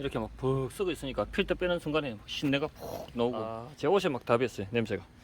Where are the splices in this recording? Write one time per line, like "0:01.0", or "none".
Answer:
0:03.6